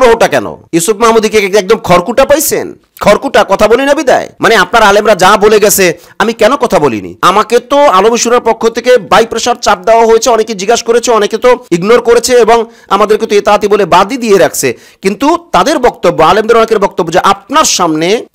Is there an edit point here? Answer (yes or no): no